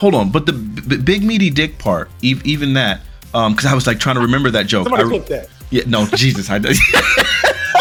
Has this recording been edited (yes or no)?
no